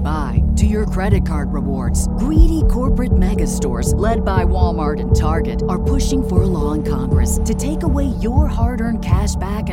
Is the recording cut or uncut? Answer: uncut